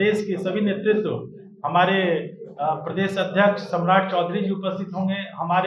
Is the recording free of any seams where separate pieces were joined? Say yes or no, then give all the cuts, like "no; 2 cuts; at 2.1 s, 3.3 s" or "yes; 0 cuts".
yes; 0 cuts